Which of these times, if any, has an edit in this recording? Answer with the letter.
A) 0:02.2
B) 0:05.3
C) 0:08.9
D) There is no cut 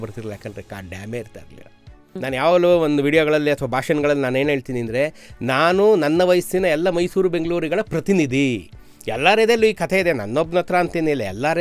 A